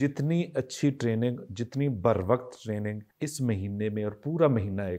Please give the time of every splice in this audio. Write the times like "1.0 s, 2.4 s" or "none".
3.1 s